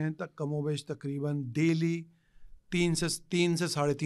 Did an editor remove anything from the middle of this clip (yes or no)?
no